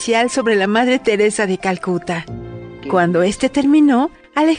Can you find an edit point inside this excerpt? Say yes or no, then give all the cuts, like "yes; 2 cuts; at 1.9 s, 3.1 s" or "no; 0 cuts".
yes; 1 cut; at 2.7 s